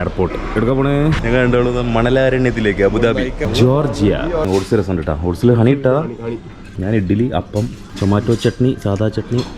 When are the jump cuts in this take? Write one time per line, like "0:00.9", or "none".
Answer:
0:01.2
0:03.4
0:04.5
0:06.7
0:07.8